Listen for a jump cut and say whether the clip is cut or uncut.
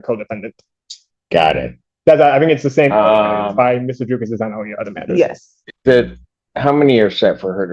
uncut